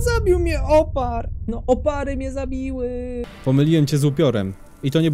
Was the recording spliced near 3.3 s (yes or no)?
yes